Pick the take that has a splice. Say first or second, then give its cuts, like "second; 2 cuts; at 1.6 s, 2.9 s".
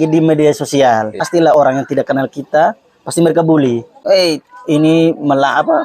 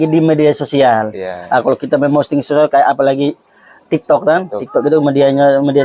first; 2 cuts; at 1.5 s, 3.9 s